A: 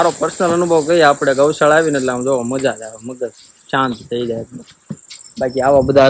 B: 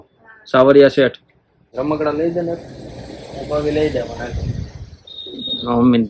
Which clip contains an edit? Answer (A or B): B